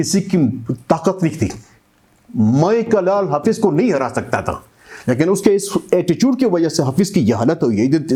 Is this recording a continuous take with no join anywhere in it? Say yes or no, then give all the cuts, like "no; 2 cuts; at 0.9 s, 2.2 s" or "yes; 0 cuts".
yes; 0 cuts